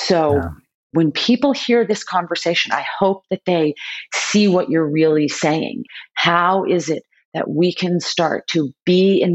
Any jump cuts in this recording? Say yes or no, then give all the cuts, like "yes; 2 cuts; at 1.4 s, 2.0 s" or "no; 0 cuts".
yes; 2 cuts; at 0.9 s, 5.9 s